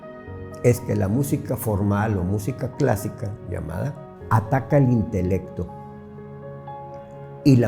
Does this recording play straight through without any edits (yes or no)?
no